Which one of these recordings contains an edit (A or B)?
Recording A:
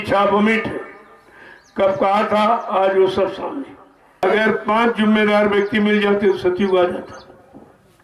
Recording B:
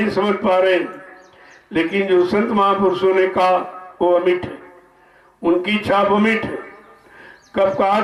A